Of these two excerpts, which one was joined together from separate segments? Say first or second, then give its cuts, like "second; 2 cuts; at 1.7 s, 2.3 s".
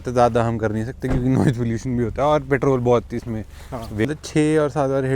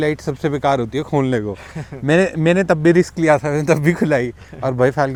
first; 1 cut; at 4.0 s